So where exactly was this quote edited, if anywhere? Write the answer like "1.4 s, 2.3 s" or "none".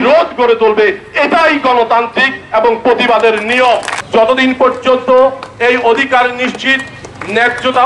3.9 s